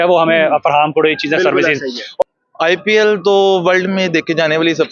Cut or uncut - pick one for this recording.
cut